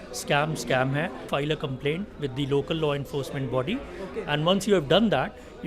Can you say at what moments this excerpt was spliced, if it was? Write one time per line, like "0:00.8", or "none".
0:01.3